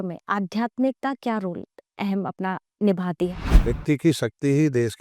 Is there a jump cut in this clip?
yes; 1 cut; at 3.7 s

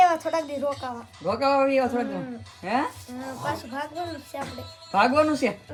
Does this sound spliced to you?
no; 0 cuts

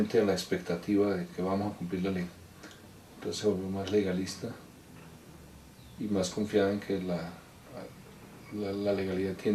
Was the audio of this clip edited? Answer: no; 0 cuts

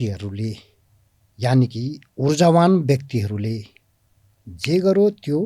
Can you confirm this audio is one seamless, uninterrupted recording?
yes; 0 cuts

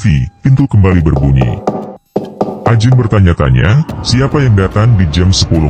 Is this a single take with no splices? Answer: yes; 0 cuts

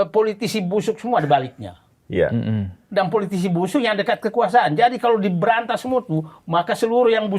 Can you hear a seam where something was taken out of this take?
no; 0 cuts

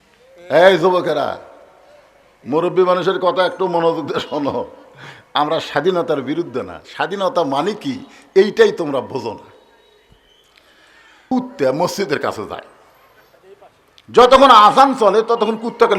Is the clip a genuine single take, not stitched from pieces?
no; 1 cut; at 11.2 s

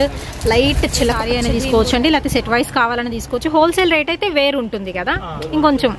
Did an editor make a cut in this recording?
yes; 1 cut; at 1.2 s

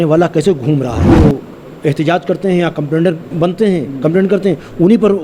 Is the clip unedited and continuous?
no; 2 cuts; at 1.1 s, 3.3 s

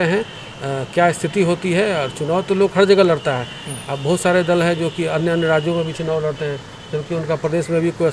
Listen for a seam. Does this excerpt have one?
no; 0 cuts

